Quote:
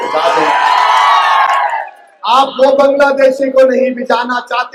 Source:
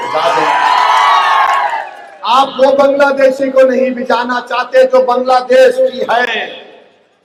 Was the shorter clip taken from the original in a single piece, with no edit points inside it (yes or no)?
yes